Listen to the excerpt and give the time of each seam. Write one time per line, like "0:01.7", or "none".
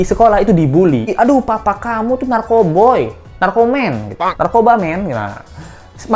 0:01.1

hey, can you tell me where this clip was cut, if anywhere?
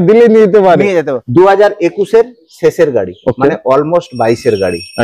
0:01.2

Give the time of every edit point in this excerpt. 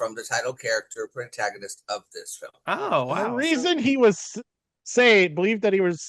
0:03.2

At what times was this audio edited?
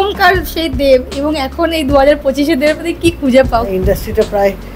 0:03.7

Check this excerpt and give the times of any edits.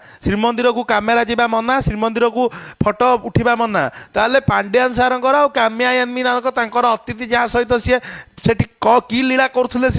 none

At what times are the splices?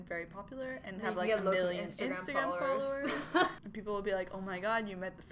0:03.6

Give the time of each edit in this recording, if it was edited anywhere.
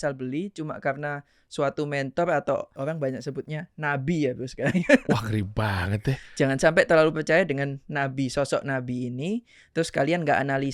0:02.7

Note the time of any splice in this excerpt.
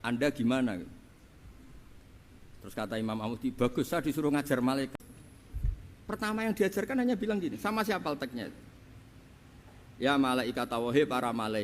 0:05.0

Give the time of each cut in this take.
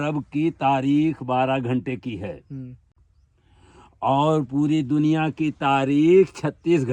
none

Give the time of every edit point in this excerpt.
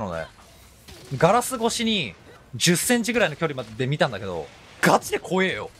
0:04.7

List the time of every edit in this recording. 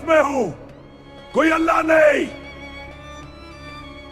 0:02.4

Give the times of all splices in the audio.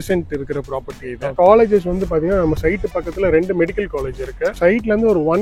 0:01.3
0:04.6

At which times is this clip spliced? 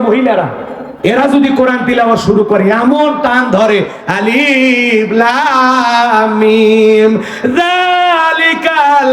none

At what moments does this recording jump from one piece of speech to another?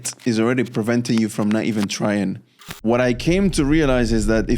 0:02.7

